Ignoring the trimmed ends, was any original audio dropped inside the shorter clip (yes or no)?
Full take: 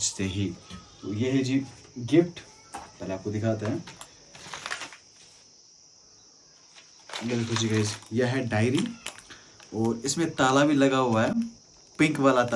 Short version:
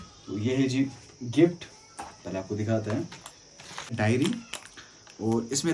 yes